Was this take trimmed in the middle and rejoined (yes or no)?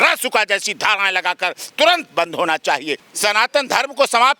yes